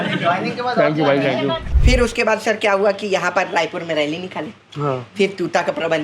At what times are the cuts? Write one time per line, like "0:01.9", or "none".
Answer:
0:01.7